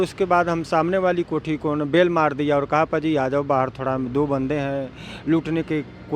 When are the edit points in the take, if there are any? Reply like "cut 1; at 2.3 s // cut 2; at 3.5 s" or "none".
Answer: none

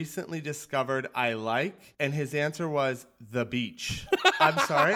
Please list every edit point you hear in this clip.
cut 1; at 4.1 s

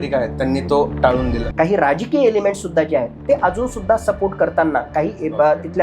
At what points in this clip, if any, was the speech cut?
cut 1; at 1.4 s

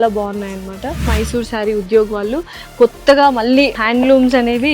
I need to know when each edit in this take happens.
cut 1; at 1.1 s // cut 2; at 3.8 s

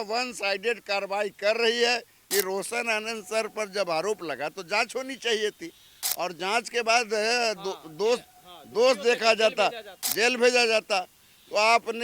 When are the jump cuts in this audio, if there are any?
cut 1; at 2.1 s

